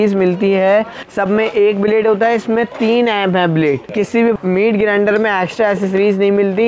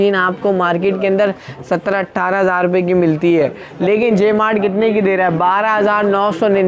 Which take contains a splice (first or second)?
first